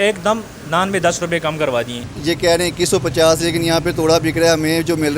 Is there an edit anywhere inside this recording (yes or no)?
yes